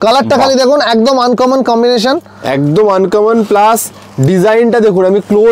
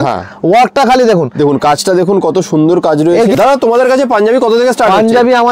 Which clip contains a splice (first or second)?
second